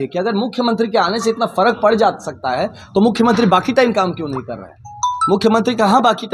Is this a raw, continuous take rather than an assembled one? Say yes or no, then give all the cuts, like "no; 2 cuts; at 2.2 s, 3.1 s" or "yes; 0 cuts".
yes; 0 cuts